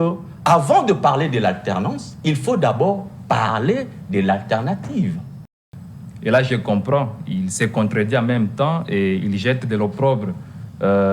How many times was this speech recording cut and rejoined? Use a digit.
1